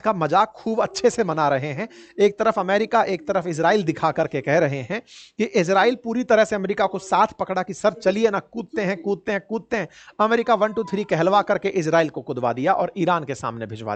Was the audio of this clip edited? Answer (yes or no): no